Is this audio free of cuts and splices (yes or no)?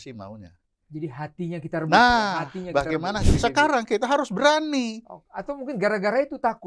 no